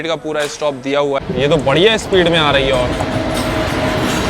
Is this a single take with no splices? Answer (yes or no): no